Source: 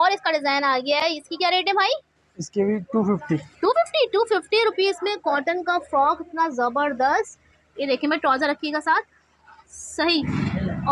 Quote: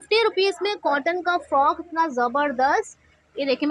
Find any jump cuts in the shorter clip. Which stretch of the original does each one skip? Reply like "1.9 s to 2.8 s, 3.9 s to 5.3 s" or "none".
none